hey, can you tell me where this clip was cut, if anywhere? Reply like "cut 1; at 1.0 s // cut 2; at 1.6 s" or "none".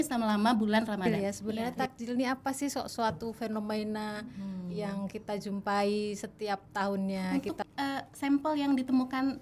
cut 1; at 1.1 s // cut 2; at 7.3 s